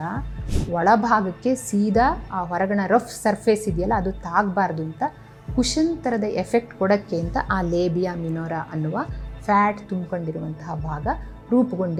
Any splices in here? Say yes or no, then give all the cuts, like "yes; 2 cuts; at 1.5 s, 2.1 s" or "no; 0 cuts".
no; 0 cuts